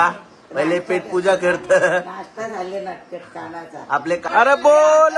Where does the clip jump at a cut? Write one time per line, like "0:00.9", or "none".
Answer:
0:04.2